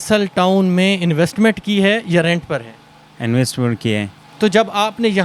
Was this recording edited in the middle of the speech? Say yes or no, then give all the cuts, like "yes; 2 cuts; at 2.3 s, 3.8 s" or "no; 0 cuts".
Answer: no; 0 cuts